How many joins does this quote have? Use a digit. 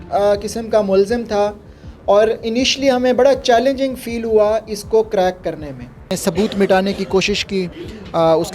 1